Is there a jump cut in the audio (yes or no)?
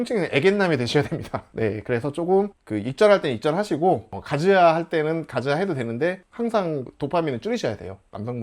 no